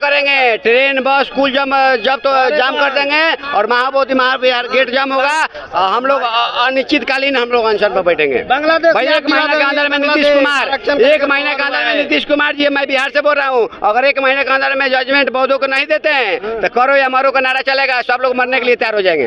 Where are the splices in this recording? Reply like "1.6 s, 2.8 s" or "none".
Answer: none